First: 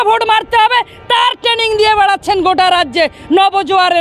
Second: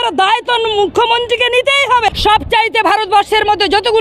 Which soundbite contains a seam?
second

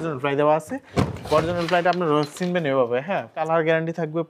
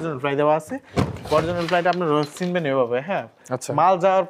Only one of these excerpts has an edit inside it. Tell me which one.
first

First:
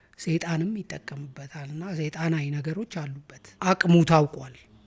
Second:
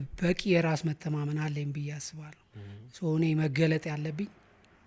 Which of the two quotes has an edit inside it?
first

